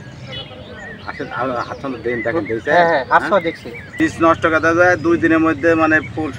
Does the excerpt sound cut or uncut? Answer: cut